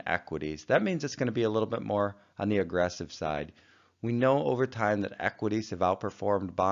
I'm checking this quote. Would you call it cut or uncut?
cut